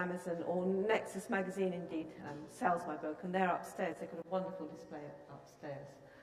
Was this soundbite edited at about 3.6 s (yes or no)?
no